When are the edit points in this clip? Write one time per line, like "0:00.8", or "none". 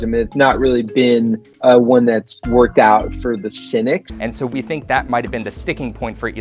0:04.1